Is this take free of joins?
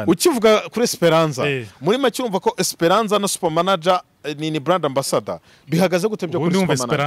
yes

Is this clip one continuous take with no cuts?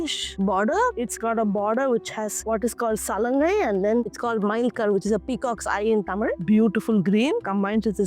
no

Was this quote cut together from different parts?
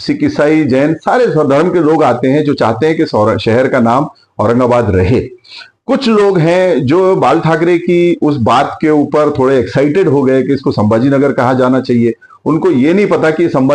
no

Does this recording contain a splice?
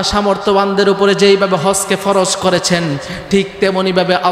no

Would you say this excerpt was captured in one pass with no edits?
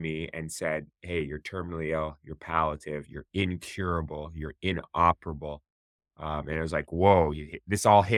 yes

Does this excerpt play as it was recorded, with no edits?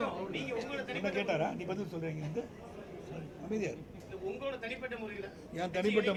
yes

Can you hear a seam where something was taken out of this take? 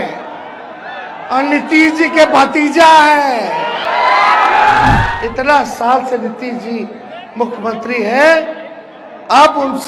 yes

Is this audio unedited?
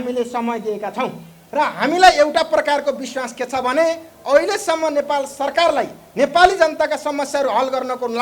yes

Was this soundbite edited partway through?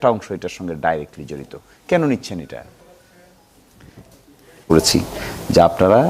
yes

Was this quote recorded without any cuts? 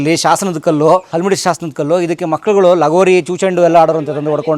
no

